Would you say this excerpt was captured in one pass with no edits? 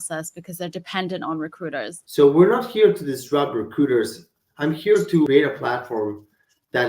no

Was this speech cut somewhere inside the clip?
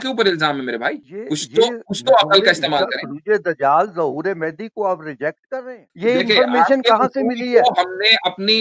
yes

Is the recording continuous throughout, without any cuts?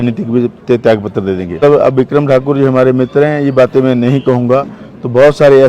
no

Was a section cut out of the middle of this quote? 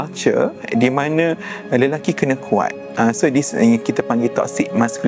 no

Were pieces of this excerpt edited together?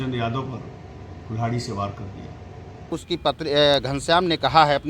yes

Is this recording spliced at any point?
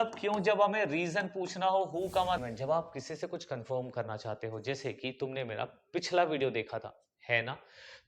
yes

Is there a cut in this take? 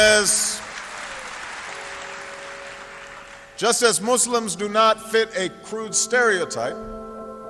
no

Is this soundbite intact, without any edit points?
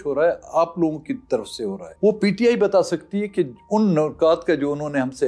no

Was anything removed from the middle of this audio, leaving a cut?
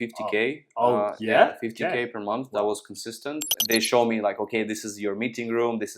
yes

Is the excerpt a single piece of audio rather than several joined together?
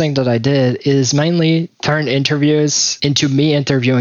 yes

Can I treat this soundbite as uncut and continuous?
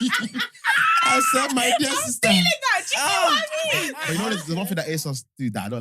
no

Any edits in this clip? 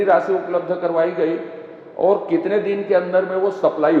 no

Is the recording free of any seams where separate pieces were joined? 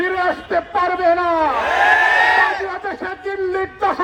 yes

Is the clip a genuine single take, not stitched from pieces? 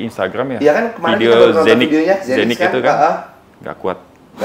yes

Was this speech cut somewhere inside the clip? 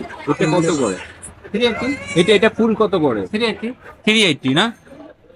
no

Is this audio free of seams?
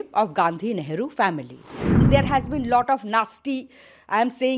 no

